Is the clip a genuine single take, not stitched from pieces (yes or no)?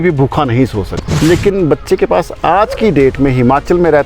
no